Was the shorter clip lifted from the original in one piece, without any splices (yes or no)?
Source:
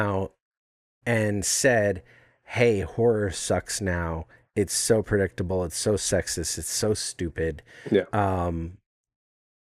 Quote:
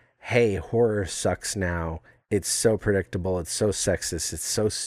yes